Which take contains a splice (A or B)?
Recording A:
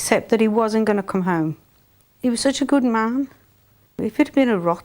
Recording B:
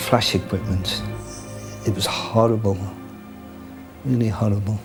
A